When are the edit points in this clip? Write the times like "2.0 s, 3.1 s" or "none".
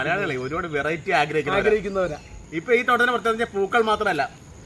2.3 s